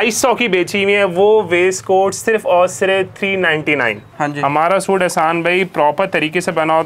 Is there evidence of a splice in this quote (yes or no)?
yes